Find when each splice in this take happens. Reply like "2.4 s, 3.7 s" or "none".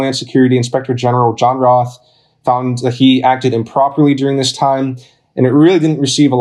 none